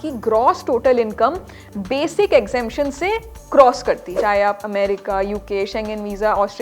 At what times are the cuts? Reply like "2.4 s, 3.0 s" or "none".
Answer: 4.1 s